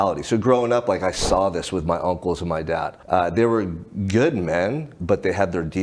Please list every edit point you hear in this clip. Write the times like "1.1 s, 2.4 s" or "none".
3.0 s

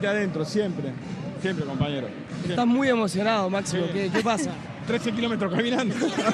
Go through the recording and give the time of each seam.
none

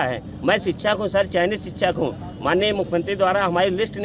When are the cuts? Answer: none

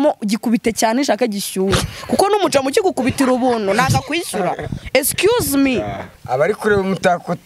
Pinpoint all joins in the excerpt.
6.1 s

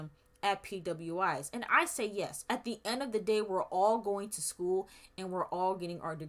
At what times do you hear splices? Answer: 2.4 s

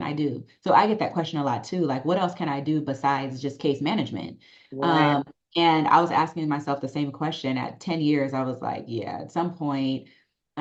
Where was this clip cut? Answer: none

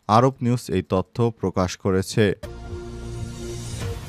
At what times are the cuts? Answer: 2.5 s

